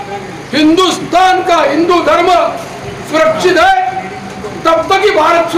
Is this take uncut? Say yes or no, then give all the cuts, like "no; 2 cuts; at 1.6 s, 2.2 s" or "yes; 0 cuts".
yes; 0 cuts